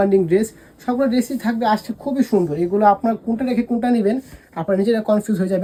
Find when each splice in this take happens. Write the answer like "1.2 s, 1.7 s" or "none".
none